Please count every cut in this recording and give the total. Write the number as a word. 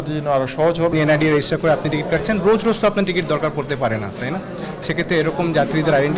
one